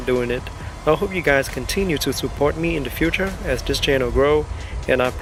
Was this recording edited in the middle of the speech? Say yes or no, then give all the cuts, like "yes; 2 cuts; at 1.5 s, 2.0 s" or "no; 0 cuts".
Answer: no; 0 cuts